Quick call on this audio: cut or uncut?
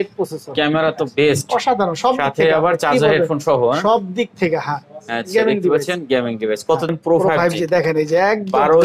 cut